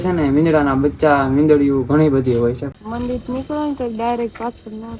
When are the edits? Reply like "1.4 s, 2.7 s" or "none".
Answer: 2.7 s